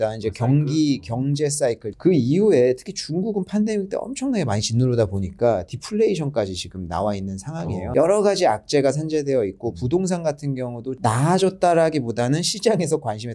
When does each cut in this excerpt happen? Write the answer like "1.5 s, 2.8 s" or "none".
1.9 s, 7.9 s, 11.0 s